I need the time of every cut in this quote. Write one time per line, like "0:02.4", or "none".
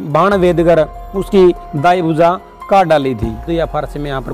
0:03.4

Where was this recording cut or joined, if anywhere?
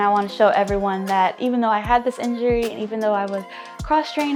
none

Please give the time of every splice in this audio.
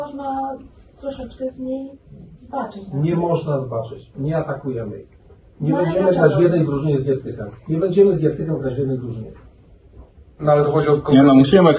none

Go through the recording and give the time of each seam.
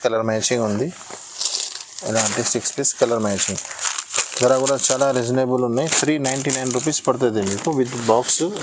none

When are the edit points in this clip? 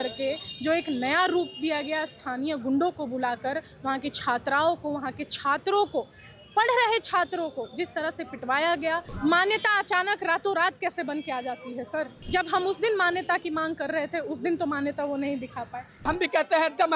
0:09.1
0:12.2
0:16.1

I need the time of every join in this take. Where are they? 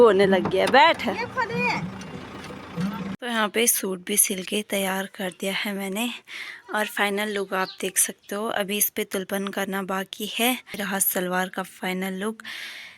0:03.1
0:10.8

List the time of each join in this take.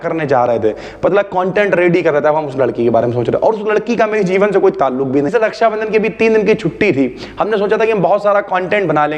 0:05.3

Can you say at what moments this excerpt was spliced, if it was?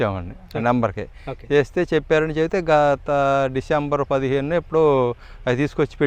none

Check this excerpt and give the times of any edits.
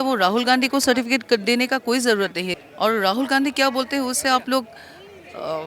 0:02.6

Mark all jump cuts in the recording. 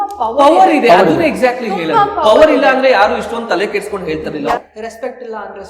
0:04.6

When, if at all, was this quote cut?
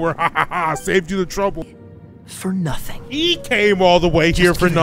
0:01.8

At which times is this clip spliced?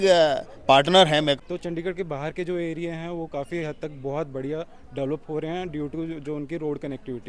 0:01.4

